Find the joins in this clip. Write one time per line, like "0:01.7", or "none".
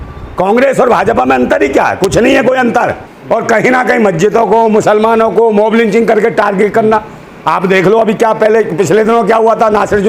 0:03.1